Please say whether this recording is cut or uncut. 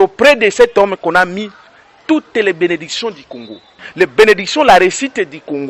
uncut